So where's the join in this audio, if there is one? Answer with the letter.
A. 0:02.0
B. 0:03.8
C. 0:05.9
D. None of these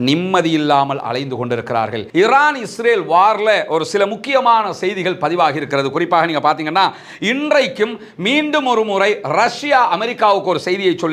A